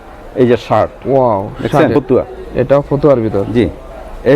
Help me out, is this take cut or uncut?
cut